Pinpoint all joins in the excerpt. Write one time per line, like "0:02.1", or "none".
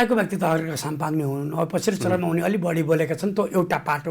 none

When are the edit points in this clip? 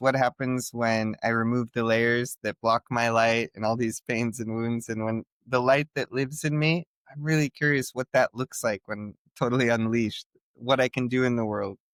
none

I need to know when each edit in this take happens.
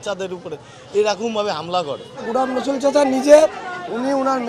0:02.1

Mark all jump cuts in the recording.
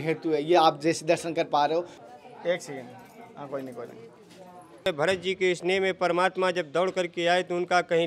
0:04.9

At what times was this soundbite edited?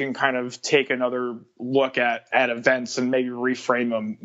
0:02.3

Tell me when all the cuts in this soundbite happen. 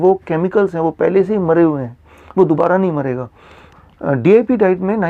0:03.7

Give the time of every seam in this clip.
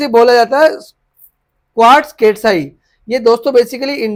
none

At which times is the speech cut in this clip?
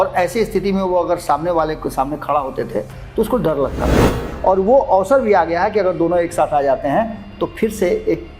0:04.3

